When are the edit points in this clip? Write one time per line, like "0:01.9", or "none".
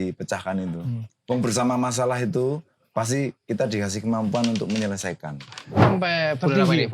0:05.8

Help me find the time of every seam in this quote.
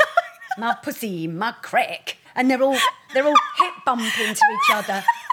0:02.3
0:03.1

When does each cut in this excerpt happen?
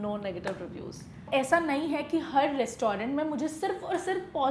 0:01.2

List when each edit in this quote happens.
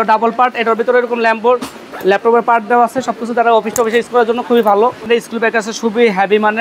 0:05.0

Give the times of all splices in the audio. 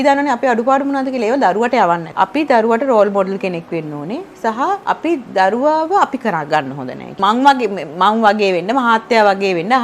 0:02.1
0:04.8
0:07.0

